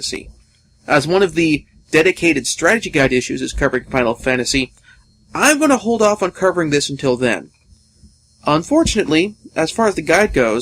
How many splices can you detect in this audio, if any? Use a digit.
1